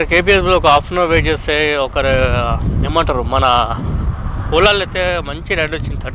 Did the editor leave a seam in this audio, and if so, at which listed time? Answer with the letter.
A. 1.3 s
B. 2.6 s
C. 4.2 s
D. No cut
D